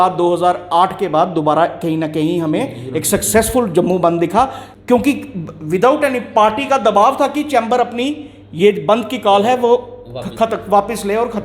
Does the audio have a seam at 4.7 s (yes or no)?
yes